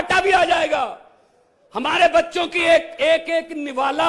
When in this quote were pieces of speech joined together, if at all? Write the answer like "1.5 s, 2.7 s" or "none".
none